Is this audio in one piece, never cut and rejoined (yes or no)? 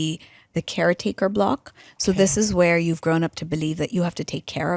yes